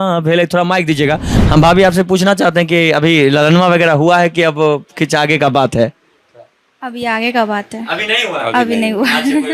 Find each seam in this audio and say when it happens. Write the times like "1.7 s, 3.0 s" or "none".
1.3 s